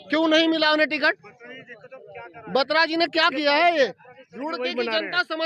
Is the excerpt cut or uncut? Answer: uncut